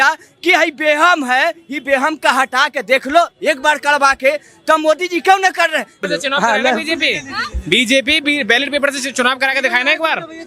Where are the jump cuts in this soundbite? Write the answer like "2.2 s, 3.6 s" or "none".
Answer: 6.0 s